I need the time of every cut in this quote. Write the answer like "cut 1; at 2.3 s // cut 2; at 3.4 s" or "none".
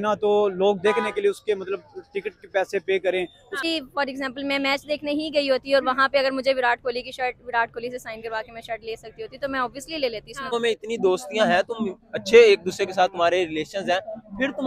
cut 1; at 3.6 s // cut 2; at 10.5 s